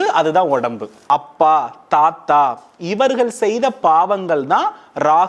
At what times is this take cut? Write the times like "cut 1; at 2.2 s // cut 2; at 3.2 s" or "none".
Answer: cut 1; at 1.0 s